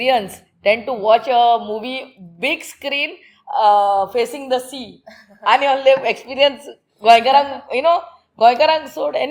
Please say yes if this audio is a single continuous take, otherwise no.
yes